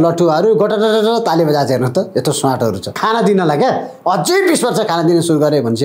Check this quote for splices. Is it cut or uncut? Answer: cut